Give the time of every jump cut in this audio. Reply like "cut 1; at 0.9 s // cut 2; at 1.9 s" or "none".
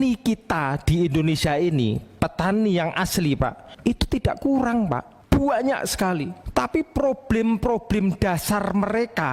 cut 1; at 3.7 s // cut 2; at 5.1 s // cut 3; at 6.4 s